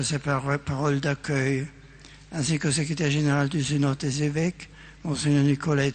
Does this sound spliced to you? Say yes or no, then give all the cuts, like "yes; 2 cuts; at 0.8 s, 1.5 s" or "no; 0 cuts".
no; 0 cuts